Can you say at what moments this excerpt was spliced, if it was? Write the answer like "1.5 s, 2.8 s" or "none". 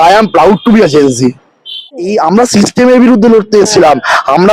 1.9 s

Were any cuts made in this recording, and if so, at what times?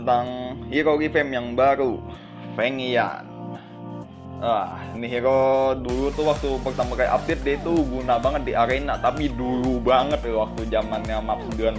none

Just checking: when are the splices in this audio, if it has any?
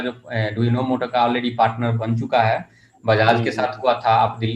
none

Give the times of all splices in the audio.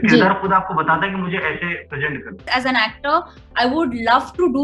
2.5 s

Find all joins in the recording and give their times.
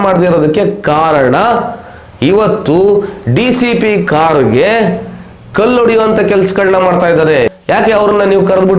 7.6 s

